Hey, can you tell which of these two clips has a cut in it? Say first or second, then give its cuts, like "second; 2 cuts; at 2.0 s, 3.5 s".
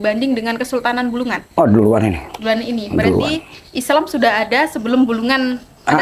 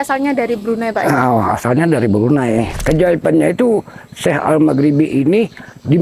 second; 1 cut; at 2.8 s